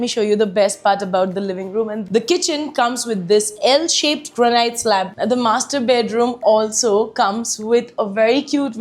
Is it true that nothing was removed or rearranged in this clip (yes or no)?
no